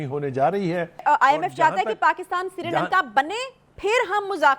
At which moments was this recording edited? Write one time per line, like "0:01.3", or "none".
0:01.0

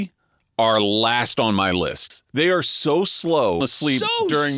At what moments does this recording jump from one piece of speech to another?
0:02.2
0:03.6

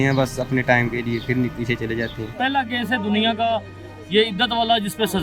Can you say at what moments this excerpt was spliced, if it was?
0:02.2

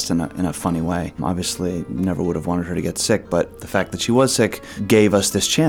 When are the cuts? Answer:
0:01.2
0:03.6
0:04.7

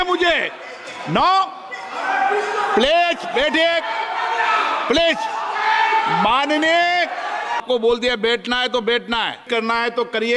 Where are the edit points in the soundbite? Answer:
0:07.6
0:09.4

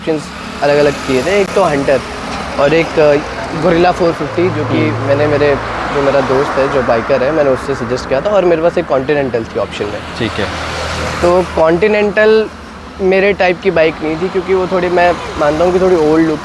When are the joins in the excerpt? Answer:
none

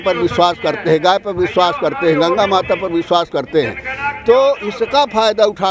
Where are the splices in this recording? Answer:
none

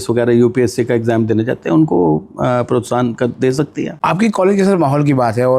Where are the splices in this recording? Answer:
0:03.9

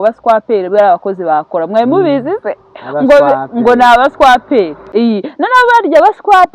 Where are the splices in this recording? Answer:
0:04.8

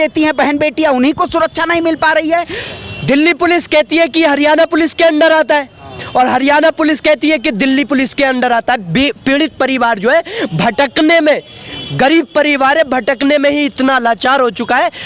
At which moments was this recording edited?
0:02.6

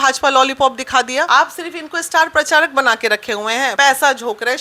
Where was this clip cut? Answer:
0:01.3
0:03.7

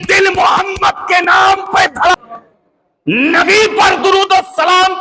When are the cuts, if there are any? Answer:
0:02.1

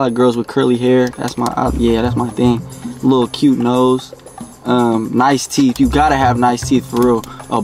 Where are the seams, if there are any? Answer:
none

